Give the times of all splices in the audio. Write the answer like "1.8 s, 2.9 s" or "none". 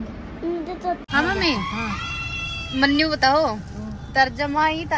1.0 s